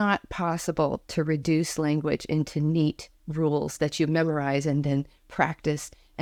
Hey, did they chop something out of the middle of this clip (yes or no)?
no